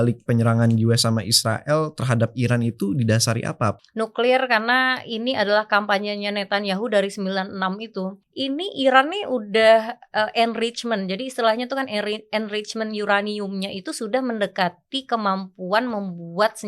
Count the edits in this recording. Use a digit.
2